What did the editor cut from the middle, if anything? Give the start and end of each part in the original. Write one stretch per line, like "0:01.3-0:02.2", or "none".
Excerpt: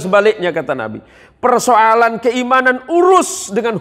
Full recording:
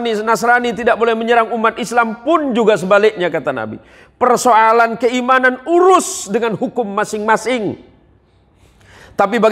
none